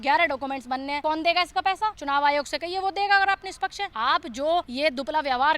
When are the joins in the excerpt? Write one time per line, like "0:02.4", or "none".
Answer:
0:01.0
0:02.0
0:03.8
0:04.7